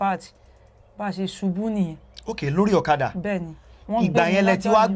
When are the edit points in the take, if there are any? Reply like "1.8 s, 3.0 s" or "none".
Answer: none